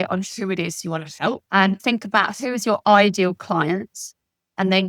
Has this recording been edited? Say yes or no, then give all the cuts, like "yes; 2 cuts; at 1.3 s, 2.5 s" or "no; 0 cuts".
yes; 1 cut; at 1.4 s